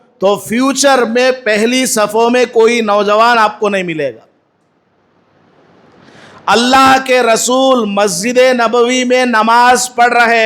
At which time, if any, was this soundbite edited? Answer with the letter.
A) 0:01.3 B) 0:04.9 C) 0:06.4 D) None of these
D